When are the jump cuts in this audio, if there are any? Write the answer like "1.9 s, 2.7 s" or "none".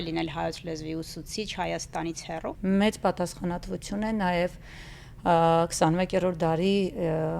2.5 s